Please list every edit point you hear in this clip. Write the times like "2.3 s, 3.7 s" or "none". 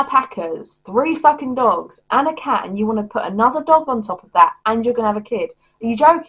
none